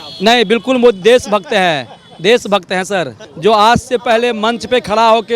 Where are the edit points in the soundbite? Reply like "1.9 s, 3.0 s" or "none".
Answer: 3.2 s